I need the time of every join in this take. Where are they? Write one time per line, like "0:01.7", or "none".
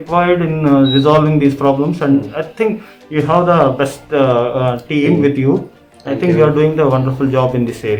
none